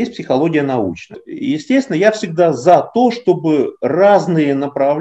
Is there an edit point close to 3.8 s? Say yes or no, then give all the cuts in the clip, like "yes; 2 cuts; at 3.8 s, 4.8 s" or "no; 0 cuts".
no; 1 cut; at 1.3 s